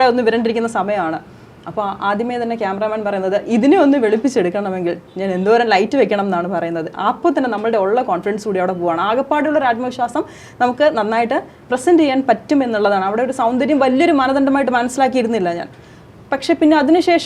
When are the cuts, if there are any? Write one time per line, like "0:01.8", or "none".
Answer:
none